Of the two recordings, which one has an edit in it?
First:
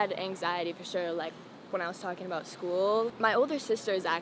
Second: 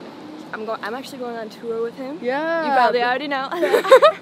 first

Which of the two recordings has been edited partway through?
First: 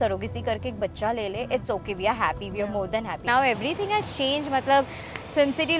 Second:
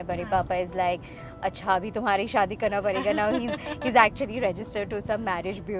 first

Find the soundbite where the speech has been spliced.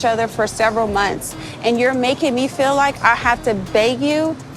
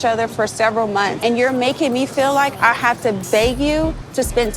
second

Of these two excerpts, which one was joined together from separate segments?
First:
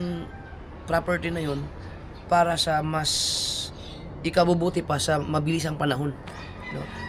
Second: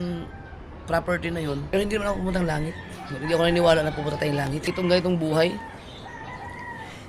second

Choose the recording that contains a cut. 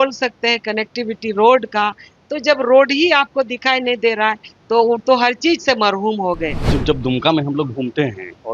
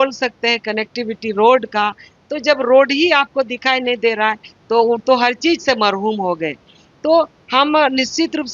first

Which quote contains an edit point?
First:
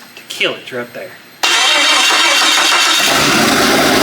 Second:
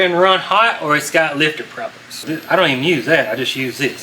second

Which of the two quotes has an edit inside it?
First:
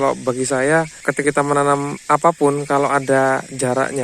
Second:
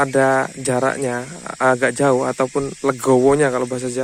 first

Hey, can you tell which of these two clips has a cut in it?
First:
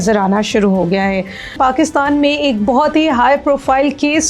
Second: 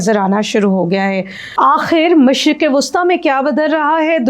first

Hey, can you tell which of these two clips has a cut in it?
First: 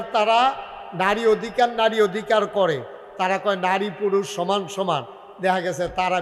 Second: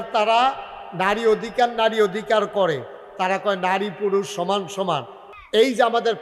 second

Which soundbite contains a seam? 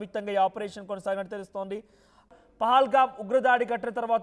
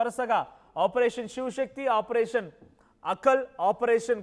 first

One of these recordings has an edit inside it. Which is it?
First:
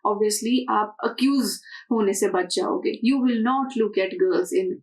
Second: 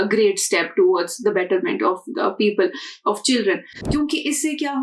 second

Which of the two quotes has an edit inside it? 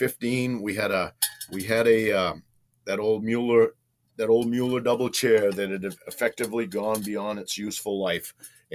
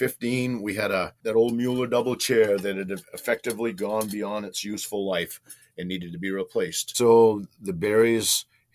second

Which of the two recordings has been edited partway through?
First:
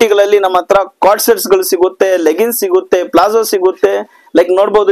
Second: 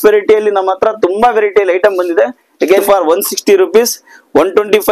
second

